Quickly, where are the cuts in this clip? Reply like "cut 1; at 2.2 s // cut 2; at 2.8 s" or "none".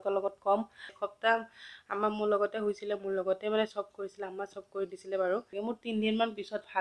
cut 1; at 1.0 s // cut 2; at 5.5 s